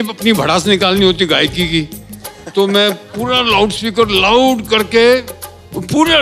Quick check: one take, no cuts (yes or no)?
yes